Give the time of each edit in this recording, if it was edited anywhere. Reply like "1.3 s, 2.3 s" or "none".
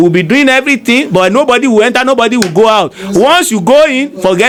none